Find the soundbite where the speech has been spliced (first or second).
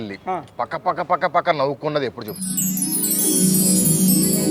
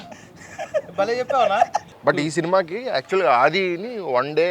second